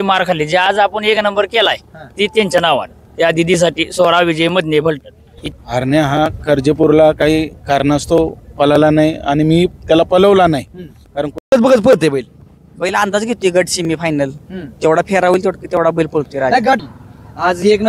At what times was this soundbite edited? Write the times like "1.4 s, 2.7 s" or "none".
5.3 s, 11.5 s, 16.8 s